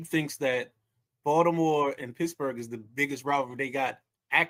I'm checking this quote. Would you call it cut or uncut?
uncut